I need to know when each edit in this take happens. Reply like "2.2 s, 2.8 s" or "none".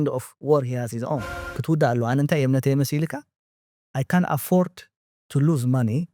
1.4 s